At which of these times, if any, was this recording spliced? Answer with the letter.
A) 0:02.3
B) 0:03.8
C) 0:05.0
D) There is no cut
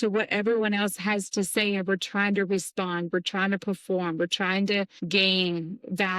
C